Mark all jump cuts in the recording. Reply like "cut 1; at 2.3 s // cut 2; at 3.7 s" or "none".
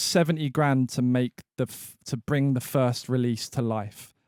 none